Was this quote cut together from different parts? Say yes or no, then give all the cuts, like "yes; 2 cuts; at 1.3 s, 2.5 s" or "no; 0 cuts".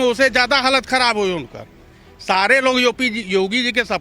no; 0 cuts